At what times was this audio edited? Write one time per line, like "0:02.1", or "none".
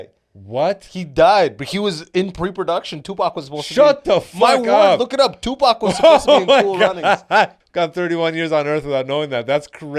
0:07.6